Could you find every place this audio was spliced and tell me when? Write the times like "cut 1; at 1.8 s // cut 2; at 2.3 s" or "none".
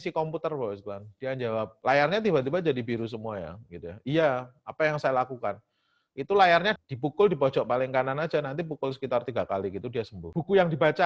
cut 1; at 1.7 s // cut 2; at 6.8 s // cut 3; at 10.3 s